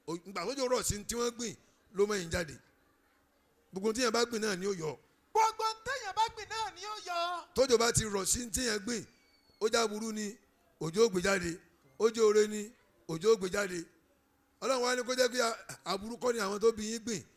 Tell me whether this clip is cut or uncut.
uncut